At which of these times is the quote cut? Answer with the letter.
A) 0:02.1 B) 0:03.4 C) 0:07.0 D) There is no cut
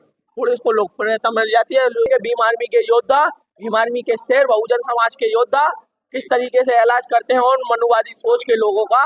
A